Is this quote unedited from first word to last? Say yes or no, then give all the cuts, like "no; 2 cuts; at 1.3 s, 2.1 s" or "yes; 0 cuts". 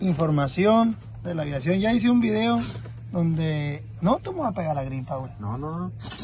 yes; 0 cuts